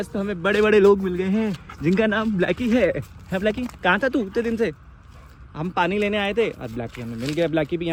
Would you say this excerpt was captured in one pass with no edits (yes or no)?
yes